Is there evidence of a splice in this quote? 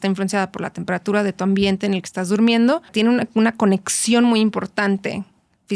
yes; 1 cut; at 2.9 s

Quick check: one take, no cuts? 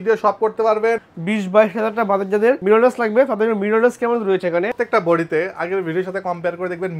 no; 2 cuts; at 1.0 s, 4.7 s

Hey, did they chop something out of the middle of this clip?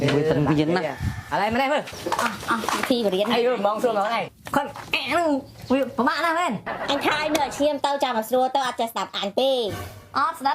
yes; 2 cuts; at 1.9 s, 4.4 s

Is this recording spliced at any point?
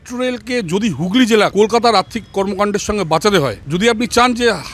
yes; 2 cuts; at 1.5 s, 3.6 s

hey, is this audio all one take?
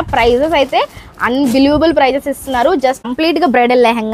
no; 1 cut; at 3.1 s

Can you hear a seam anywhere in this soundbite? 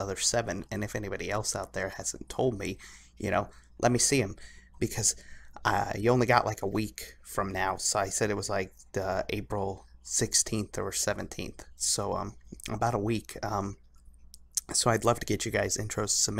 no; 0 cuts

